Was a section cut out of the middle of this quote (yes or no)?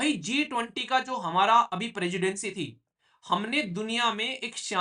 no